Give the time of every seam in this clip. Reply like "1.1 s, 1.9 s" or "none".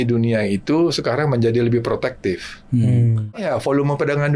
3.4 s